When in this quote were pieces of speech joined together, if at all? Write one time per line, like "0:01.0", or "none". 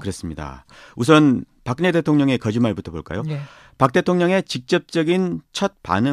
0:02.4